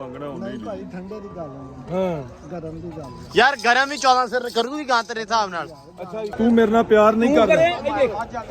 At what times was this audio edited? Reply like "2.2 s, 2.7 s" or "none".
6.3 s